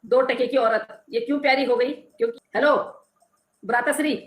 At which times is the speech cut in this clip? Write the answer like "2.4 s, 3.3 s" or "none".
2.4 s